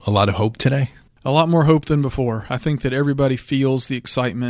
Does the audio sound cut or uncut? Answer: uncut